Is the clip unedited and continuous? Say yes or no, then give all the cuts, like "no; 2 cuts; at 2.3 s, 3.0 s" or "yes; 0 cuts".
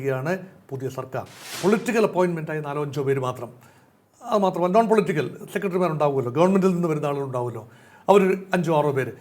no; 1 cut; at 1.5 s